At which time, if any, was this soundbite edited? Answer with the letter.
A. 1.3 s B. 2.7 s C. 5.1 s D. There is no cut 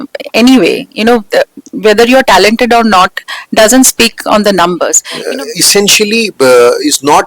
C